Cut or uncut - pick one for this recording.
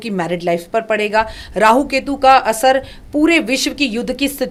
uncut